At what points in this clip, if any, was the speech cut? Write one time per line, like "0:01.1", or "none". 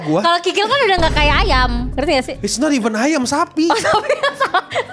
0:01.8